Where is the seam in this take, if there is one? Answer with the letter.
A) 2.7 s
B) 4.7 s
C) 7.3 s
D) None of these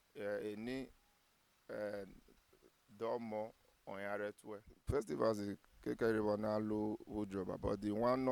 B